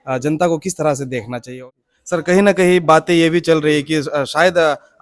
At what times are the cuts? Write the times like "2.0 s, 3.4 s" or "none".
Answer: 1.5 s